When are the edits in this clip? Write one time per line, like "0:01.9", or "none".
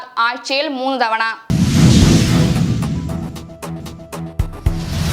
0:01.4